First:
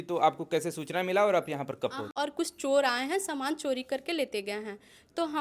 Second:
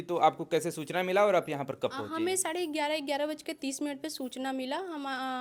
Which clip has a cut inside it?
first; 1 cut; at 2.1 s

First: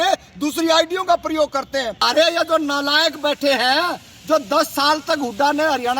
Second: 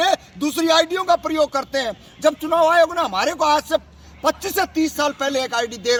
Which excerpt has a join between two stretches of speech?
first; 1 cut; at 2.0 s

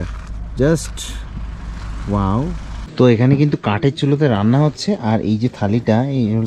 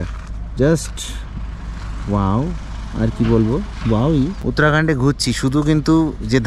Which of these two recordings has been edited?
first; 1 cut; at 2.9 s

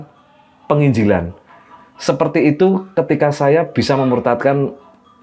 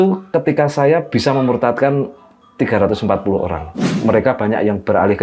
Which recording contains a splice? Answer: second; 1 cut; at 3.9 s

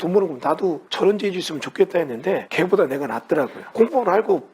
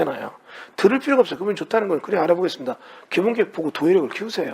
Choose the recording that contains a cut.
first; 3 cuts; at 0.9 s, 2.5 s, 3.6 s

